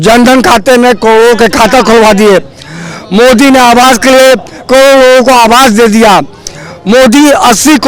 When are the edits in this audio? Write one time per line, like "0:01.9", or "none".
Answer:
none